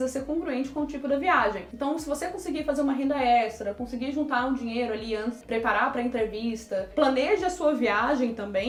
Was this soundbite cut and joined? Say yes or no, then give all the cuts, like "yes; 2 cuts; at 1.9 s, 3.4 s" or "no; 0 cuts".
no; 0 cuts